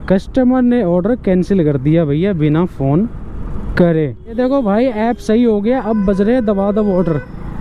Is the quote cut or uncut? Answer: cut